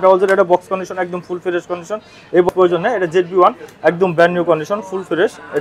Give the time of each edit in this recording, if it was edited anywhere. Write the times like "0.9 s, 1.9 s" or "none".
2.5 s